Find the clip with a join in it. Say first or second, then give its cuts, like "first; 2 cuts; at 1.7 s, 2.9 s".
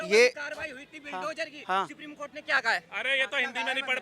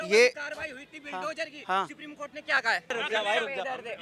second; 1 cut; at 2.9 s